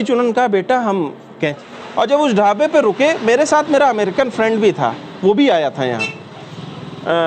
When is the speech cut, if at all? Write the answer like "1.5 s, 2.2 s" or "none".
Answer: 1.6 s

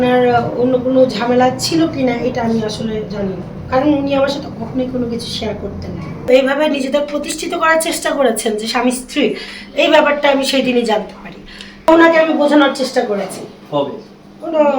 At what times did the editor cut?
6.3 s, 11.9 s

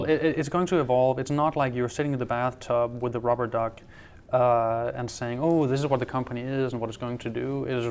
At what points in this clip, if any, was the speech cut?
none

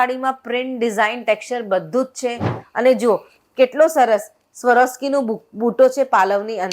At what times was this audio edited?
2.6 s

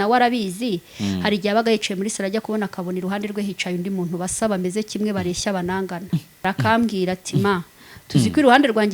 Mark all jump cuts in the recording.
6.5 s

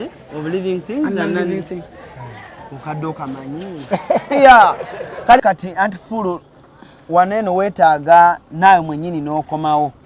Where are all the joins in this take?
5.4 s

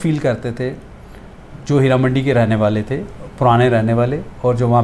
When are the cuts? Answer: none

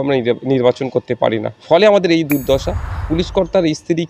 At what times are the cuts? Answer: 3.1 s

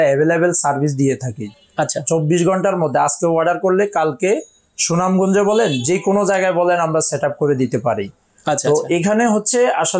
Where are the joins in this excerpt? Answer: none

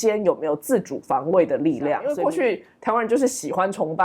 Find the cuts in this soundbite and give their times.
2.1 s

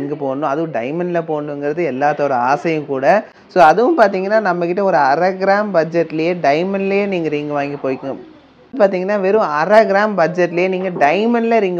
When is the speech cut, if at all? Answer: none

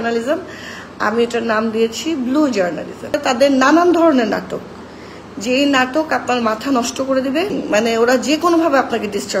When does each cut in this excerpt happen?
3.2 s, 7.5 s

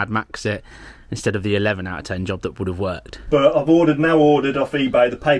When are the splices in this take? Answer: 3.1 s

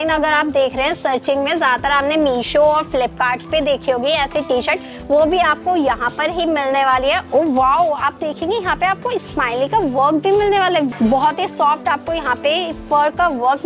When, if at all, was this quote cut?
7.2 s, 10.9 s

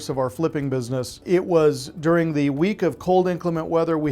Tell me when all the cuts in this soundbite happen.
1.2 s

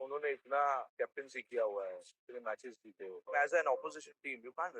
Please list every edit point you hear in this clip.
0.9 s, 3.2 s

